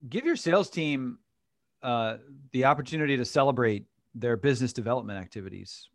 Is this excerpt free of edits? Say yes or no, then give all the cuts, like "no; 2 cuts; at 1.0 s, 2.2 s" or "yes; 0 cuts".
yes; 0 cuts